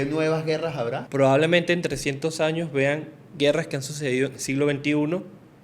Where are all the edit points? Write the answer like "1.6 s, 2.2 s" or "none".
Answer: 1.0 s